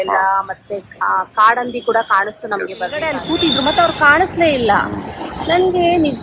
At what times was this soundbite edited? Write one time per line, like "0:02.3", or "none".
0:03.2